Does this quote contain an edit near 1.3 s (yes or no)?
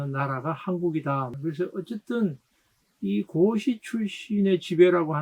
yes